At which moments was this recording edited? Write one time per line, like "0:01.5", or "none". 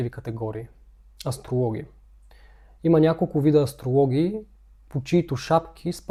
none